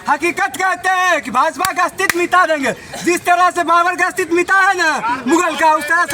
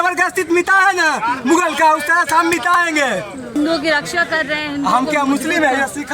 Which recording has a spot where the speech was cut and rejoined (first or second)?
second